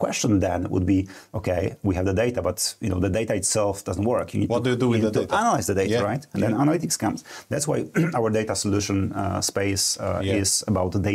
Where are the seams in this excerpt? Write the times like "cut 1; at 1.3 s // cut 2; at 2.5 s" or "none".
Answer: none